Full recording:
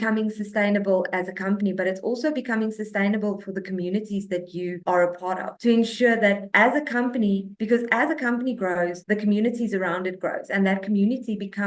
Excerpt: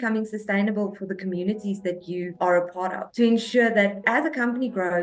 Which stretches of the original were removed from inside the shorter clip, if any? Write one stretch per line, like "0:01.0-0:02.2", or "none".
0:06.5-0:07.9